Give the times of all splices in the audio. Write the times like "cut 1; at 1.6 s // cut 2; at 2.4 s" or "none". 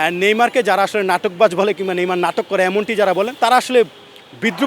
cut 1; at 3.3 s